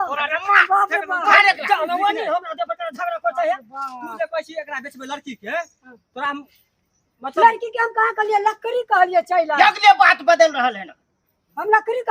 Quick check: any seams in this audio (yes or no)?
no